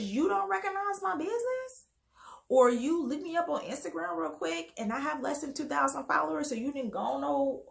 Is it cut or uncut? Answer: uncut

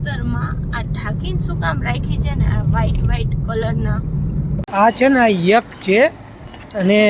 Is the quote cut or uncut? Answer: cut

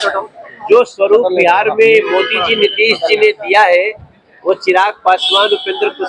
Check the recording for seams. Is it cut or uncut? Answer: uncut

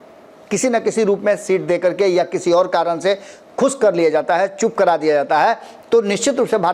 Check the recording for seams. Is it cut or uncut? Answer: uncut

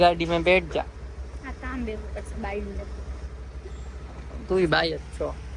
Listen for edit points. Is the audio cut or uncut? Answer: uncut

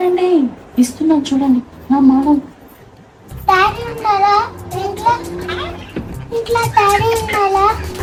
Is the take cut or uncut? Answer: uncut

